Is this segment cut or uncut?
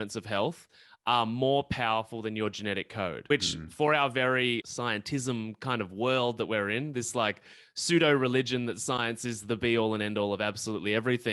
cut